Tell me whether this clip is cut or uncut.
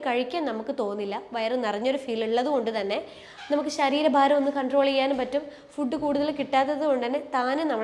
uncut